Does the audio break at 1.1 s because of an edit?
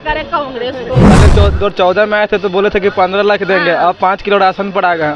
yes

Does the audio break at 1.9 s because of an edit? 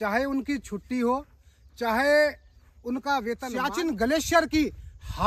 no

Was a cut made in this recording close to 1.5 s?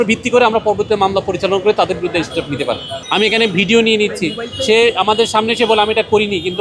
no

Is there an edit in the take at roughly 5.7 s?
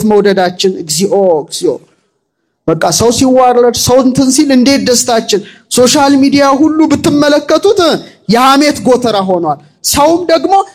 no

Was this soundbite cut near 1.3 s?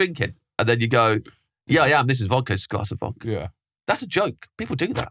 no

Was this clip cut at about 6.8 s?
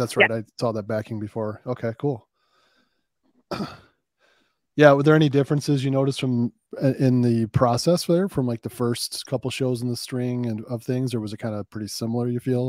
no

